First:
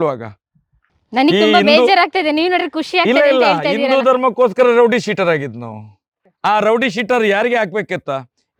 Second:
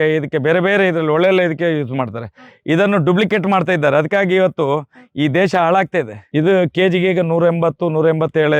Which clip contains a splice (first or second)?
second